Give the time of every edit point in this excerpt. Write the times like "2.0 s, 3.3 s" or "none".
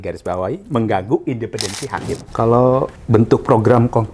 2.2 s